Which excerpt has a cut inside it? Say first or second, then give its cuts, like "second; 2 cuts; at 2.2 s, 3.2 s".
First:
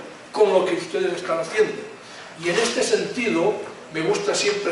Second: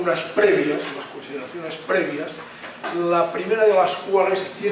second; 1 cut; at 1.7 s